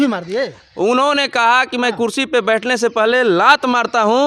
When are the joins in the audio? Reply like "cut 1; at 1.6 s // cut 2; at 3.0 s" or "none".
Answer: none